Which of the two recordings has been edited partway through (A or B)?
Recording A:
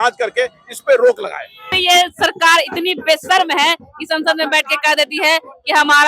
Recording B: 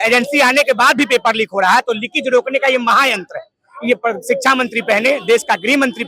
A